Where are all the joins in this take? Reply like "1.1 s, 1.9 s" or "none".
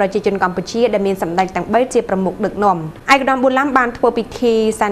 2.9 s